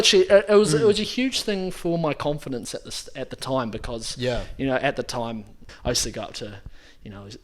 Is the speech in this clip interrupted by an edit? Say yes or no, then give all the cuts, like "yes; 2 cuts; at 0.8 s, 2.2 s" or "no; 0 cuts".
yes; 1 cut; at 5.7 s